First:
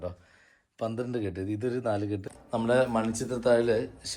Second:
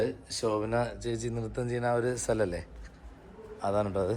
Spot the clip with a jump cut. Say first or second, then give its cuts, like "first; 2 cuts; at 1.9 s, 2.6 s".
first; 1 cut; at 2.3 s